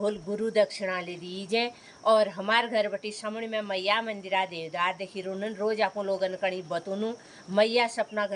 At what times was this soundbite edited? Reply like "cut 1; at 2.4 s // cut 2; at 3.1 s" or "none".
none